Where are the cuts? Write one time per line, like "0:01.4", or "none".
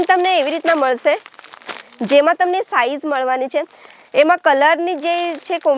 none